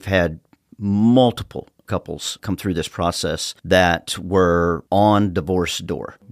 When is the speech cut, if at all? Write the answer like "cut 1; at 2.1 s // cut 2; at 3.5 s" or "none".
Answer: cut 1; at 1.8 s // cut 2; at 3.5 s